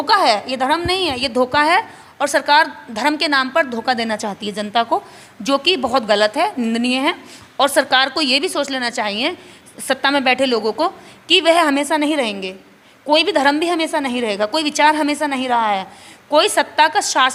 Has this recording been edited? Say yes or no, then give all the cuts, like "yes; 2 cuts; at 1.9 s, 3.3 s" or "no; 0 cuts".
no; 0 cuts